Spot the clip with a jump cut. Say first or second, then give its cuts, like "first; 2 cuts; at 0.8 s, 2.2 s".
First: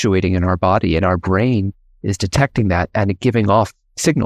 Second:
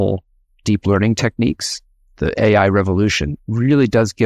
second; 1 cut; at 3.3 s